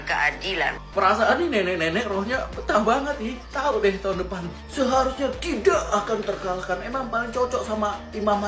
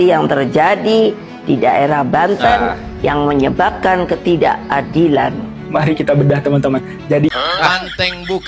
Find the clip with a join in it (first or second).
second